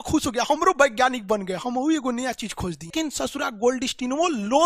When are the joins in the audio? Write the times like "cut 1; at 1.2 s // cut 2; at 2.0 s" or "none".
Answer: cut 1; at 2.9 s